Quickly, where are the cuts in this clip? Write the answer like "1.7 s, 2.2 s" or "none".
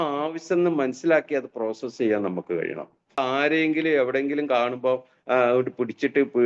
3.2 s